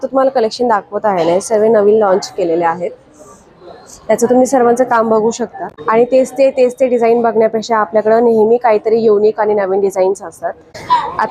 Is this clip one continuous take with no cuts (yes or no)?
yes